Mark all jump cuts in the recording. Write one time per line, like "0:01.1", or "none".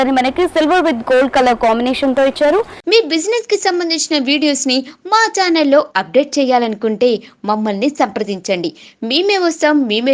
0:02.8

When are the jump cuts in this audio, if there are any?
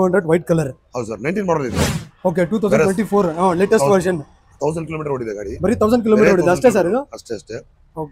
0:01.9

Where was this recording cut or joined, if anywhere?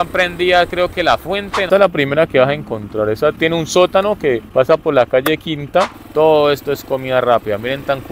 0:01.7
0:03.4
0:04.5
0:06.0

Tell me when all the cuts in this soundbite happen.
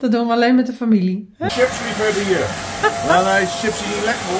0:01.5

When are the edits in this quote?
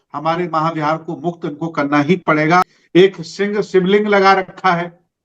0:02.7

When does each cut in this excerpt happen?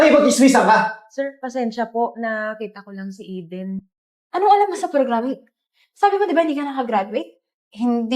0:03.8

